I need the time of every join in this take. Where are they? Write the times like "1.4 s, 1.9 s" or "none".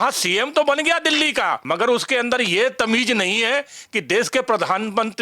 1.6 s